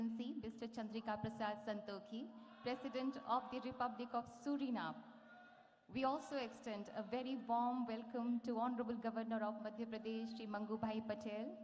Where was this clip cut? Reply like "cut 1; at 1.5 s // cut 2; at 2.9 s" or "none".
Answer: none